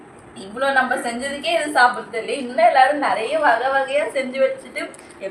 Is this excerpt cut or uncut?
uncut